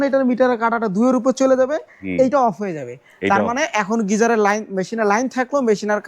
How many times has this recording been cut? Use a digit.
0